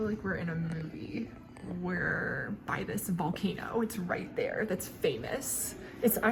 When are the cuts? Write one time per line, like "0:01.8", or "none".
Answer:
none

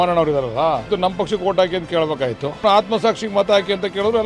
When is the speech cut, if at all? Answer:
0:00.9
0:02.6

